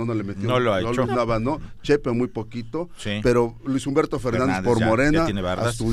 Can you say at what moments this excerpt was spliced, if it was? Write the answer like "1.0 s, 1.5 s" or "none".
none